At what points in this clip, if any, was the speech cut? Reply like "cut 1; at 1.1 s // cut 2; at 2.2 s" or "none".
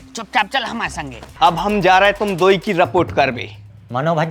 cut 1; at 1.2 s